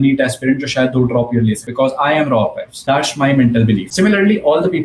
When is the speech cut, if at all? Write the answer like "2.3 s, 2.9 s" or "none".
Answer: 1.6 s, 2.7 s, 3.9 s

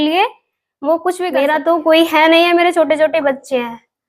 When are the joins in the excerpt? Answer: 1.4 s

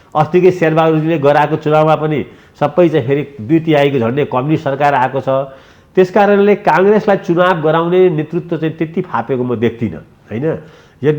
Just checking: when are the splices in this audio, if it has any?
none

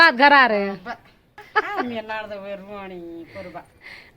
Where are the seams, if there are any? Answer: 1.5 s

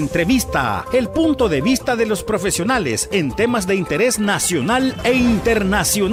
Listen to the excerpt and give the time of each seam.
none

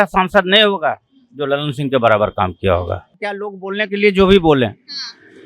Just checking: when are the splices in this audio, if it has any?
3.3 s

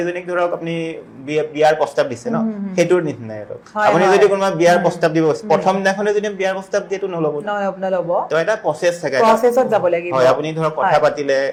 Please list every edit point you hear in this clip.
none

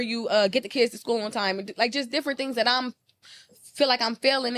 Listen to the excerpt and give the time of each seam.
none

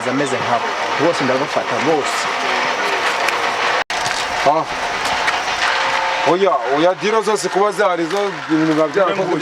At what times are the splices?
3.9 s

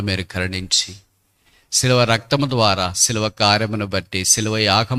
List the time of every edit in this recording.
none

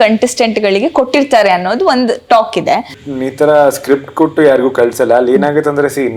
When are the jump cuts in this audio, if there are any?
3.0 s

